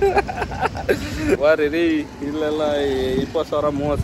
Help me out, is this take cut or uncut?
cut